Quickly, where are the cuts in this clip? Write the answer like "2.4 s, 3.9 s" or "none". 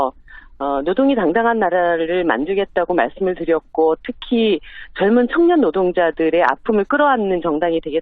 2.6 s